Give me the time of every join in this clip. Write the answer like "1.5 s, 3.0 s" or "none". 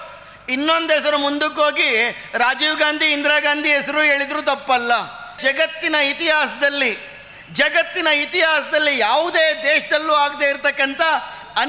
5.3 s